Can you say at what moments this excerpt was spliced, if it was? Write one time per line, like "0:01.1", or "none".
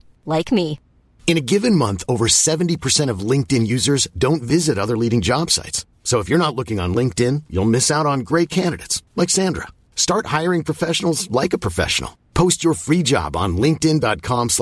none